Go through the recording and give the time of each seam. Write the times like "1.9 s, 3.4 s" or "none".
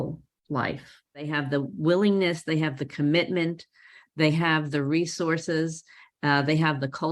1.4 s